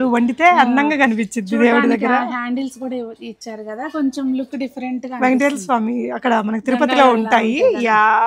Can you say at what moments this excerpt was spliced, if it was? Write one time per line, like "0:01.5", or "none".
none

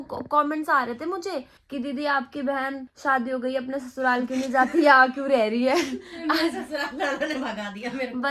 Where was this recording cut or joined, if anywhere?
none

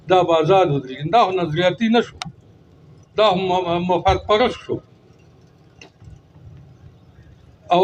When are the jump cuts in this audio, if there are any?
none

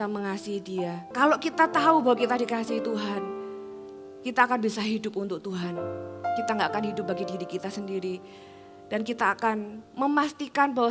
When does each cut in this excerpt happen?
0:01.1

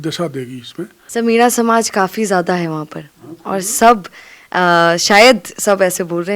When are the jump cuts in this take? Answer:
0:01.0

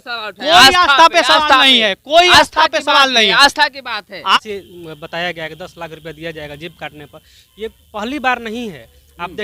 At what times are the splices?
0:04.4

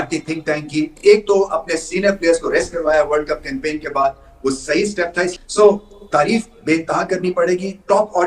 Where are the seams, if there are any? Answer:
0:05.4

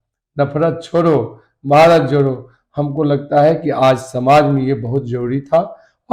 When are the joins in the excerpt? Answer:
none

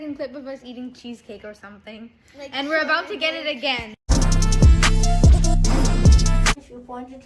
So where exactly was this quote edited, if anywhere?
0:04.1
0:06.5

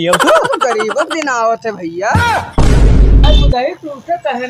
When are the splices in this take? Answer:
0:02.5

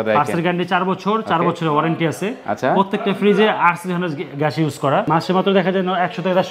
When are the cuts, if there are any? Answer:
0:05.1

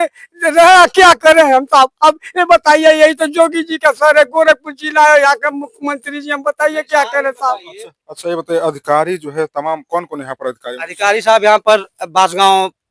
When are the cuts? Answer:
none

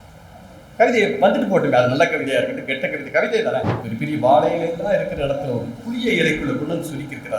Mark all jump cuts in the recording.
0:03.7

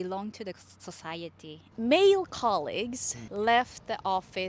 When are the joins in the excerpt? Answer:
0:01.6

